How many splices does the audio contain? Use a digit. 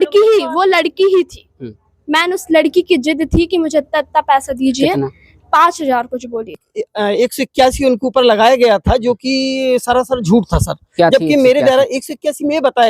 1